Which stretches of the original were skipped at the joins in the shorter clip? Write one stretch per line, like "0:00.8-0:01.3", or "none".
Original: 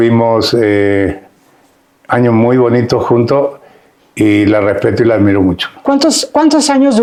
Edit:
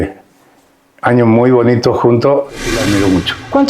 0:03.8-0:05.1

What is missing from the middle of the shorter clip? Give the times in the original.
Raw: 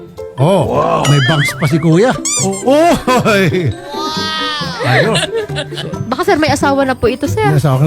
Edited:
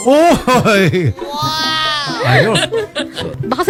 none

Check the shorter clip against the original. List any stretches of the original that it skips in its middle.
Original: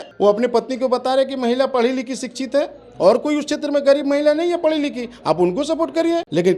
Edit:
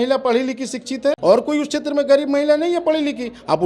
0:02.7-0:03.0

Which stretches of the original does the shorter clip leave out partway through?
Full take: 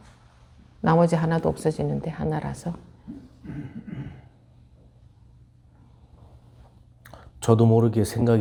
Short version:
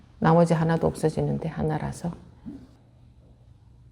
0:03.3-0:04.3

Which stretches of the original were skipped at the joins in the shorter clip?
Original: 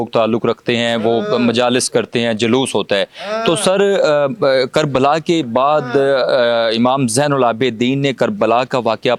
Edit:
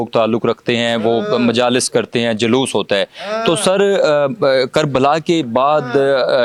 none

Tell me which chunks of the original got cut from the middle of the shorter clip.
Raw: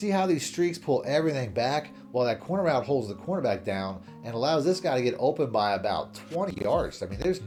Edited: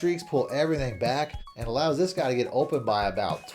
0:02.0-0:04.1

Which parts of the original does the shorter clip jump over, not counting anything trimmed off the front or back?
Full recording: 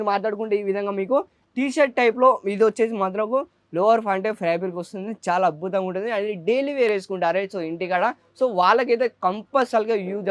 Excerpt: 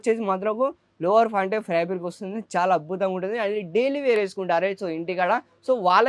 none

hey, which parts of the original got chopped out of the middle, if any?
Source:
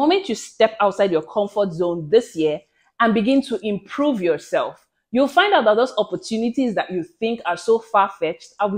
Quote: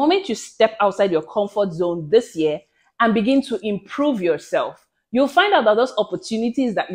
none

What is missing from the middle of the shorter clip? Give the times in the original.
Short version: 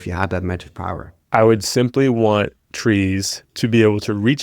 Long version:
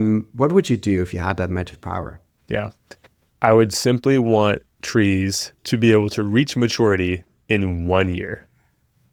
0:02.2-0:03.2

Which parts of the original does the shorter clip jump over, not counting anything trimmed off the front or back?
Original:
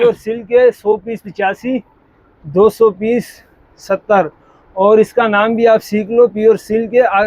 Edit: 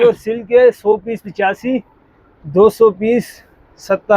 none

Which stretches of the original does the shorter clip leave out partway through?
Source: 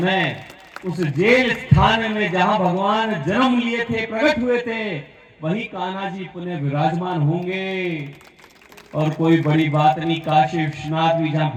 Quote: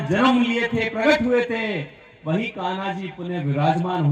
none

